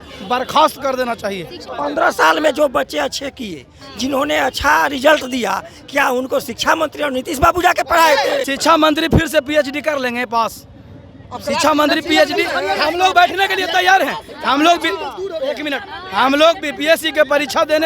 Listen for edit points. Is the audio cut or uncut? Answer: cut